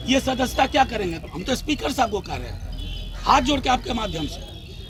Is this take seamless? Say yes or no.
yes